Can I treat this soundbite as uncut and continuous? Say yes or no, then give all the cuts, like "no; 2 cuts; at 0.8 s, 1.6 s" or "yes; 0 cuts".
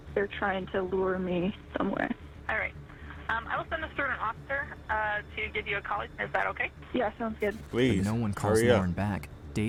yes; 0 cuts